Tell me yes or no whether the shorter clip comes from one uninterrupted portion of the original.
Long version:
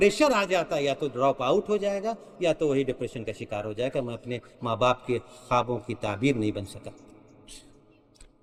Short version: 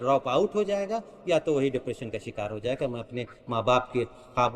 yes